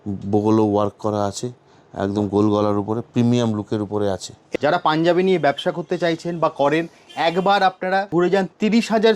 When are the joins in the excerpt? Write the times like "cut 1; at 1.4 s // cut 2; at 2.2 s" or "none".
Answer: cut 1; at 4.4 s // cut 2; at 8.1 s